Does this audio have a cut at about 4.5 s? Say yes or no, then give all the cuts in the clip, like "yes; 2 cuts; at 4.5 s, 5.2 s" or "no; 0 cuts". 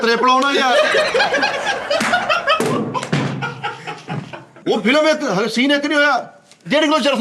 yes; 1 cut; at 4.5 s